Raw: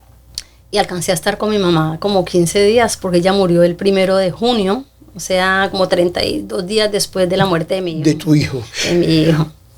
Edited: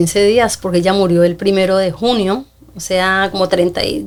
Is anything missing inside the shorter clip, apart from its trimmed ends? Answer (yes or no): no